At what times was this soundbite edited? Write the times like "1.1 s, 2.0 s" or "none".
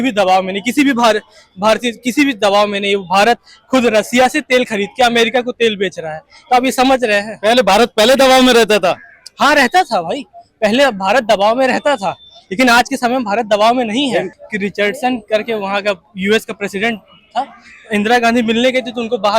none